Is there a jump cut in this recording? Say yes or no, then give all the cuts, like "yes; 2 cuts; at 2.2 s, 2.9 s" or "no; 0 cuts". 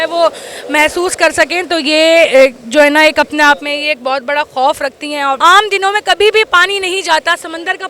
yes; 1 cut; at 5.4 s